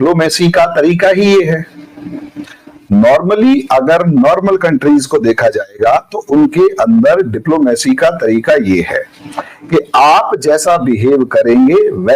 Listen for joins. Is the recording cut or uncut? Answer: uncut